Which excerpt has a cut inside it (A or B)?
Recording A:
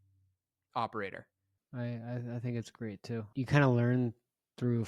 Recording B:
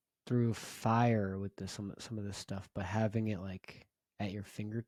A